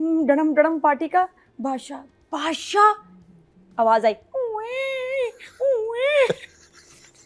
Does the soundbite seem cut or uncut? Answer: uncut